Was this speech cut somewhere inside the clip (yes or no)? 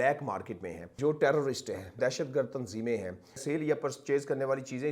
yes